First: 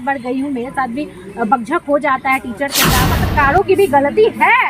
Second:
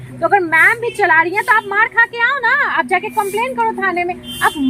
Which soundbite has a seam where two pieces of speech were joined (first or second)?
first